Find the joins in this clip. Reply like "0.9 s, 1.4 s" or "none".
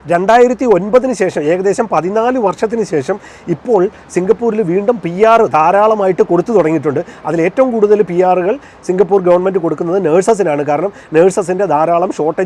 none